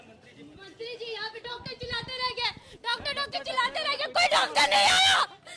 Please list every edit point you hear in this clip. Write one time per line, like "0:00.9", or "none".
none